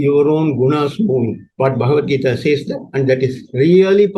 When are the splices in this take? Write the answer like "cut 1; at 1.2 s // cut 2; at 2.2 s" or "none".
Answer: cut 1; at 1.4 s